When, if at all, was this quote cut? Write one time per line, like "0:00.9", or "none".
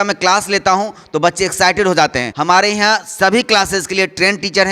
0:02.3